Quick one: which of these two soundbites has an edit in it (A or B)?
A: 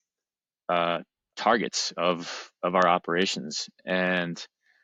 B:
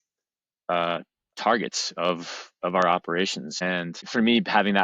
B